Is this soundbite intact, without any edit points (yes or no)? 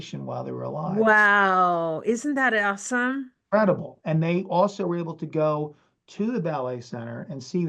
yes